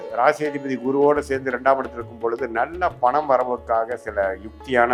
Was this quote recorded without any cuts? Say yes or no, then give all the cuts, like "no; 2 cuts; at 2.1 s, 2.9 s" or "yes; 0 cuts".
yes; 0 cuts